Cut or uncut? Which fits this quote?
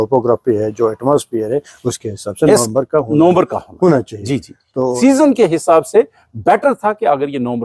cut